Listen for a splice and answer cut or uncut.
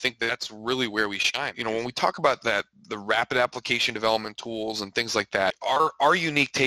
cut